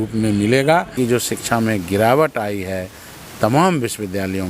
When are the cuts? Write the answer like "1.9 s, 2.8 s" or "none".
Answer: 0.9 s